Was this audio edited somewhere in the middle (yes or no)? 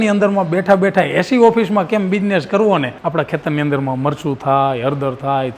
yes